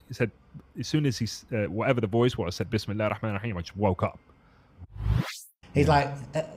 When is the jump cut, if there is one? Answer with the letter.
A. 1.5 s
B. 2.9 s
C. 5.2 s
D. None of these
C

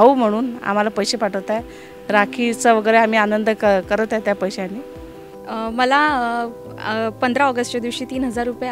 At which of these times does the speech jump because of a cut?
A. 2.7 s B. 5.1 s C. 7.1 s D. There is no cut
B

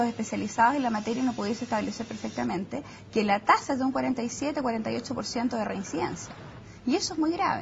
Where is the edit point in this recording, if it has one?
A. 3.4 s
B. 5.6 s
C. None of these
A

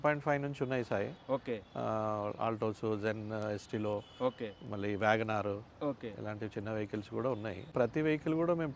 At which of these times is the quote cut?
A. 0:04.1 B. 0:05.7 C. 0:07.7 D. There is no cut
C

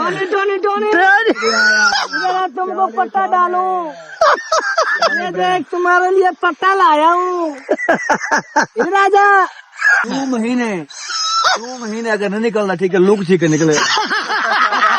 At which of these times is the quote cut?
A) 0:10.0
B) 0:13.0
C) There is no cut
A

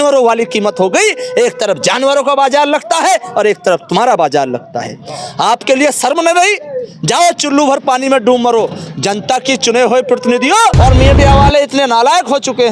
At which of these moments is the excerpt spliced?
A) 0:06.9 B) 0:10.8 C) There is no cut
B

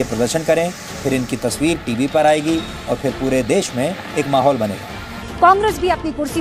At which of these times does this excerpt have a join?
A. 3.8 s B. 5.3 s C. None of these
B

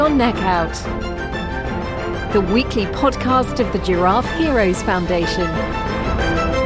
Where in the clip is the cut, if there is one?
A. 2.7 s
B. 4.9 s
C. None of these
C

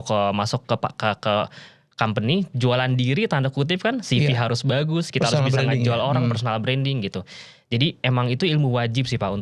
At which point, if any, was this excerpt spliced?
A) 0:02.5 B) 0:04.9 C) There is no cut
C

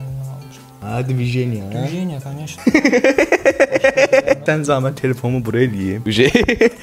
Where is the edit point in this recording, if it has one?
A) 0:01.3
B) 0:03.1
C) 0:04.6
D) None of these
D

